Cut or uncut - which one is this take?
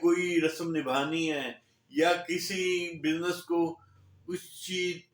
uncut